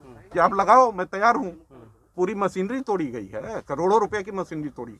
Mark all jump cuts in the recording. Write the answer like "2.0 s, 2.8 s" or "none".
2.1 s